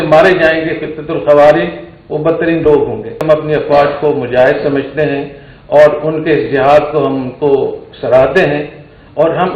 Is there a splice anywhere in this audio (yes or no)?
yes